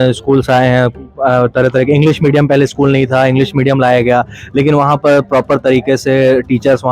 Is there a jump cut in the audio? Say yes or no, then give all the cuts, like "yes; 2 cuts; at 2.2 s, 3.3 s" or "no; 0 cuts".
no; 0 cuts